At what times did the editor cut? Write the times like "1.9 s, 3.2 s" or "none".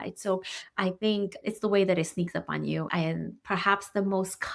2.9 s